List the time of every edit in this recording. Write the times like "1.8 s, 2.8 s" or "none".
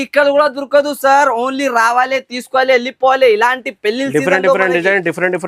none